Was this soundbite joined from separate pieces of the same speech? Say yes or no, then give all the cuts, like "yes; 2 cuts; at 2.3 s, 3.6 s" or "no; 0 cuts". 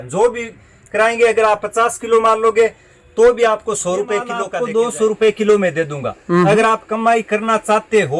yes; 1 cut; at 4.4 s